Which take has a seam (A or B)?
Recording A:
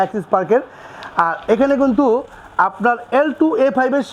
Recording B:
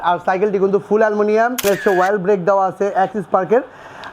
B